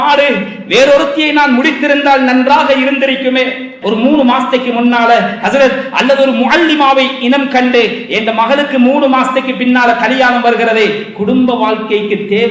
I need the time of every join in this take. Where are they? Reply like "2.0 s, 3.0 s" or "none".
3.7 s